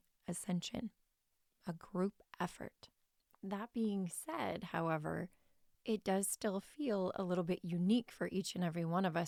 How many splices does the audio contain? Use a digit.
0